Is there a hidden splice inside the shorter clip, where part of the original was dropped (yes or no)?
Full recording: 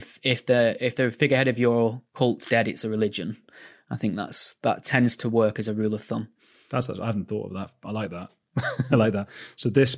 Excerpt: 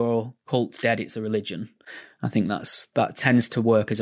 no